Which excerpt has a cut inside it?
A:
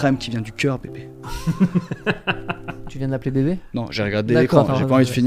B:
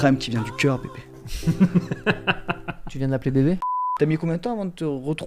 B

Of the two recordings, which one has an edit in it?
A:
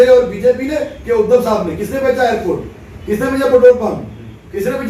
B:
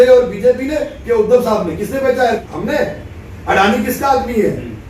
B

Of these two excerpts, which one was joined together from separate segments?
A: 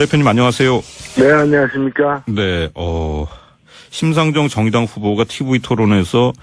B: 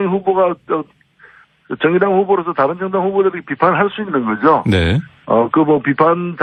A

